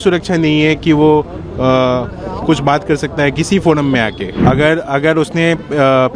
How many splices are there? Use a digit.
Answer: 1